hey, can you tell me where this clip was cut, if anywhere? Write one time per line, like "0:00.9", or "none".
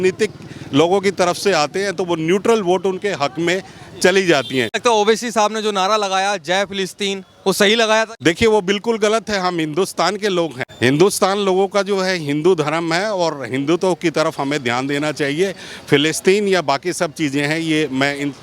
0:04.8
0:08.1
0:10.6